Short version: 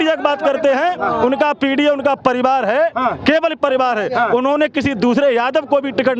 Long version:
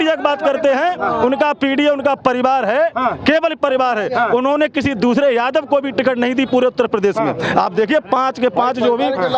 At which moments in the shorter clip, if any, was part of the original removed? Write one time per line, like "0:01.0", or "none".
none